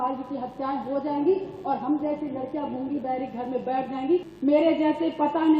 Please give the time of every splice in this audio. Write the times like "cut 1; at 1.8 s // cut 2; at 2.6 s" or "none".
cut 1; at 4.3 s